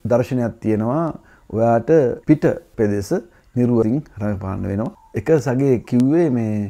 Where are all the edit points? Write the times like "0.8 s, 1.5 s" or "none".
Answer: 4.9 s